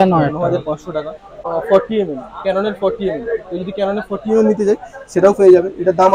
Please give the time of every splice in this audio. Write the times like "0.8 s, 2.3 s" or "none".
1.4 s